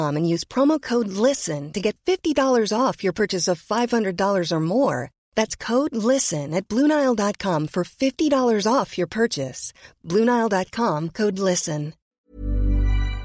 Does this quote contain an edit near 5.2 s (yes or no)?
no